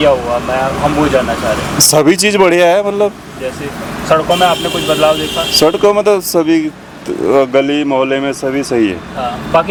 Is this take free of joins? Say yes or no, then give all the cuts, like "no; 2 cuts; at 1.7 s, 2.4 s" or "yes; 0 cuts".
yes; 0 cuts